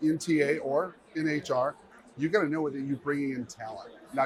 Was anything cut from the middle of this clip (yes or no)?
no